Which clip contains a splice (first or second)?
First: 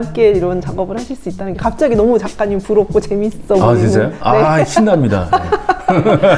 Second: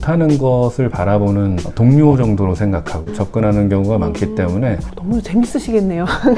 second